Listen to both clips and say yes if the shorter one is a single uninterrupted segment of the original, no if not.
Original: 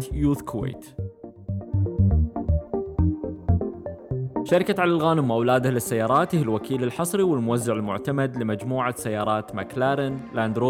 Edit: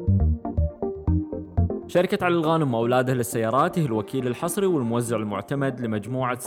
no